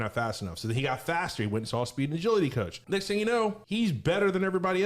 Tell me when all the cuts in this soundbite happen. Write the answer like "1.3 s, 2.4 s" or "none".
2.7 s, 3.6 s